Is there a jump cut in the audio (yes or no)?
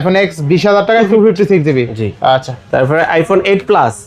no